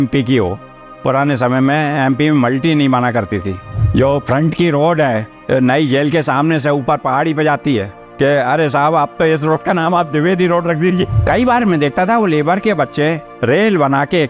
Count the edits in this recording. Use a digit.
3